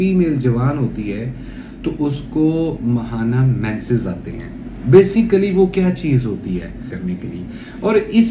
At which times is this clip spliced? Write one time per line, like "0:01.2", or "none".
0:06.9